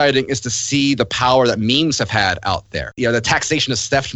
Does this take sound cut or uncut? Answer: cut